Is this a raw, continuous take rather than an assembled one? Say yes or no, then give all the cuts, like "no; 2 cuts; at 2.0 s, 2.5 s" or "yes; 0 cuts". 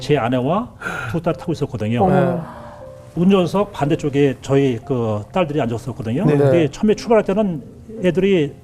no; 1 cut; at 2.9 s